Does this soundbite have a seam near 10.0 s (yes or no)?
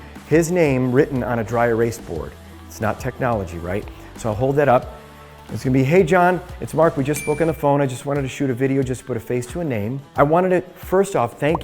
yes